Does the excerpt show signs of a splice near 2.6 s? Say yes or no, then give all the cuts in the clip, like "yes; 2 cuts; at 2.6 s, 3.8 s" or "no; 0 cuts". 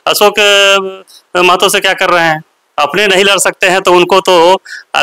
yes; 1 cut; at 2.6 s